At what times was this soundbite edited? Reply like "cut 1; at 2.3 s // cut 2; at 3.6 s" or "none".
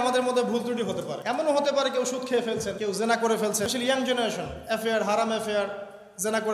cut 1; at 1.2 s // cut 2; at 2.8 s // cut 3; at 3.7 s